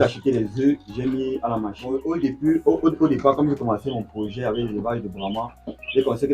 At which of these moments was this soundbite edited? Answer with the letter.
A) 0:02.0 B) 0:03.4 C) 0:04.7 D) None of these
A